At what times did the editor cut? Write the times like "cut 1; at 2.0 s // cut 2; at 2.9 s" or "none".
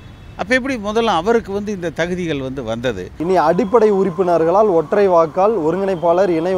cut 1; at 3.1 s